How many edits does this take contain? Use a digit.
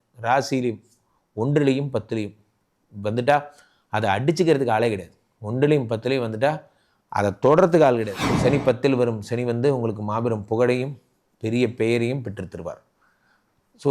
1